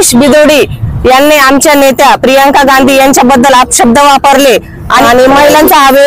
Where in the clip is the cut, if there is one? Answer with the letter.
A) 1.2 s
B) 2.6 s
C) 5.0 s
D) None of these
C